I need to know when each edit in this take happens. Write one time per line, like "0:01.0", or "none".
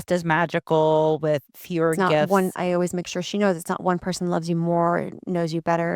0:02.3